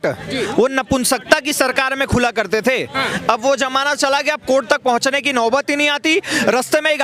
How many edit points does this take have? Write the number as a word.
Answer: zero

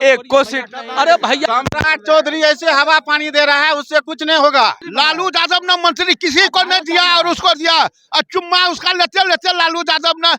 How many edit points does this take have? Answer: two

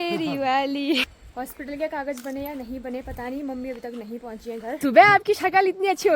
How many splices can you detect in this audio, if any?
two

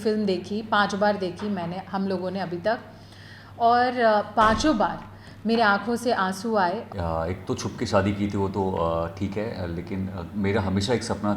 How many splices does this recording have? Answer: one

